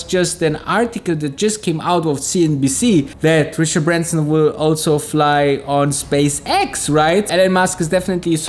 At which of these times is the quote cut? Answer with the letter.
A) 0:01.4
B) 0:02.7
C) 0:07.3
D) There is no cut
C